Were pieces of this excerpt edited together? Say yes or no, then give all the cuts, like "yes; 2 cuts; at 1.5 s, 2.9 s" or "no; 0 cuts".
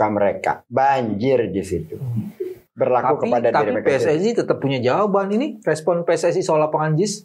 yes; 1 cut; at 2.6 s